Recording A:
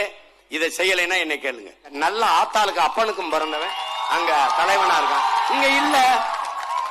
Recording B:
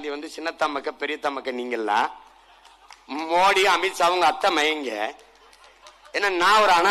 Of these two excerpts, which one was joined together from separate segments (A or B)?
A